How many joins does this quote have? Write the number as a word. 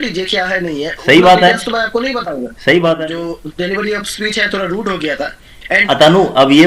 two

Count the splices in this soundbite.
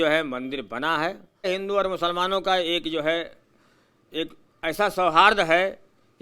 one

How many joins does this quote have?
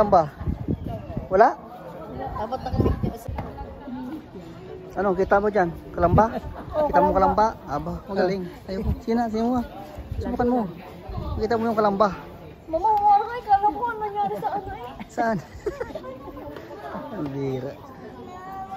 one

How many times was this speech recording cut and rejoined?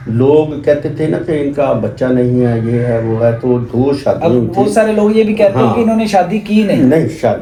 zero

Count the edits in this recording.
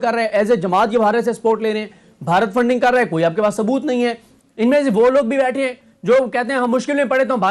one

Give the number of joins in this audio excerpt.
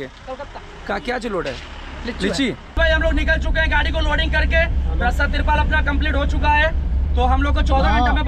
one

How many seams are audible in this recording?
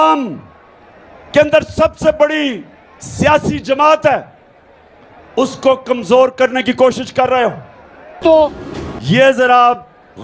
one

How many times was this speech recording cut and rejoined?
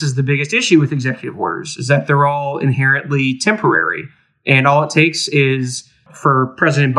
one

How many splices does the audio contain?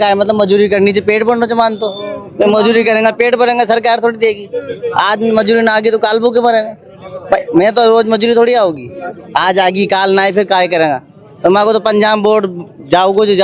zero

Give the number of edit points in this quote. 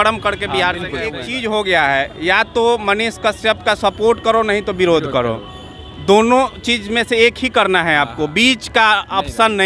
one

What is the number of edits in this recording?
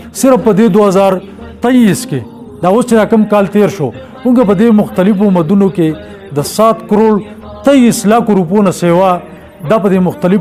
zero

